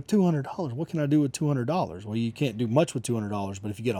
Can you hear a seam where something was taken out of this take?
no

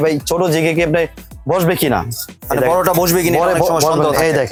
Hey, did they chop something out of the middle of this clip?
no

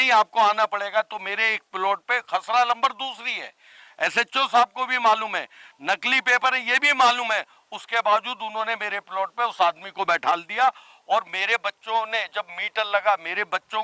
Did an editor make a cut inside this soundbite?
no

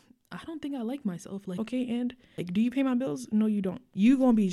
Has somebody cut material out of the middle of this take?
yes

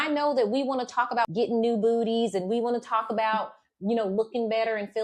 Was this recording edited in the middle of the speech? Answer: yes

